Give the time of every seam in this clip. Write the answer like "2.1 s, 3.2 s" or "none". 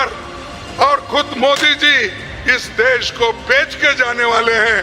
none